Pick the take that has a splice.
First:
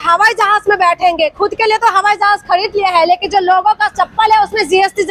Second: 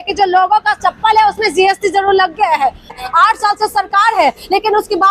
second; 1 cut; at 3.0 s

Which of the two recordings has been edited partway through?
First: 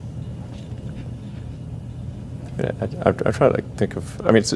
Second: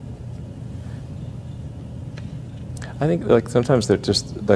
first; 1 cut; at 3.4 s

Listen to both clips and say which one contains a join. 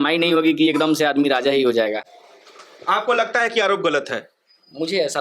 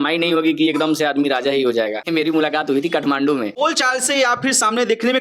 second; 2 cuts; at 2.0 s, 3.5 s

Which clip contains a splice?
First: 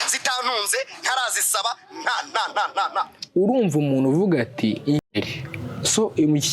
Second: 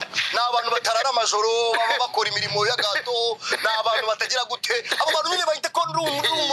first; 1 cut; at 5.1 s

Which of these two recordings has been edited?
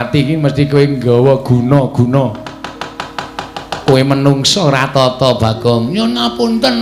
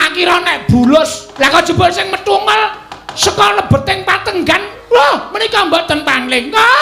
second; 1 cut; at 1.2 s

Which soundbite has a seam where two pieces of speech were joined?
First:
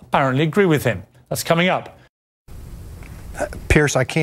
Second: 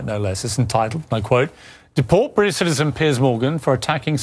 first; 1 cut; at 2.8 s

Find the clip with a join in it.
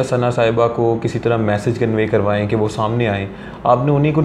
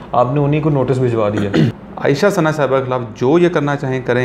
second; 1 cut; at 1.7 s

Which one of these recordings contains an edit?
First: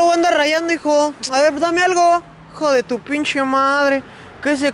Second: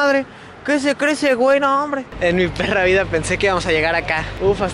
second; 1 cut; at 2.1 s

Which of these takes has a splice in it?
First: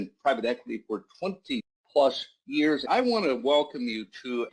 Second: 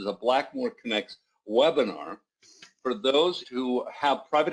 first; 2 cuts; at 1.8 s, 2.8 s

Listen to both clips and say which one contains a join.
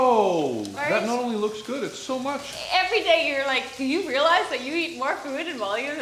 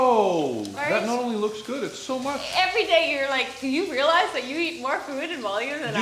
second; 1 cut; at 2.4 s

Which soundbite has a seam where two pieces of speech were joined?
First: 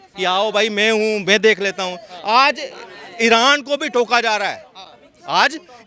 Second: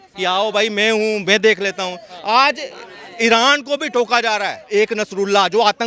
second; 1 cut; at 4.7 s

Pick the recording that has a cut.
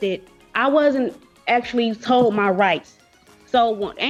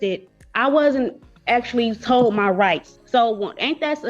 second; 1 cut; at 2.9 s

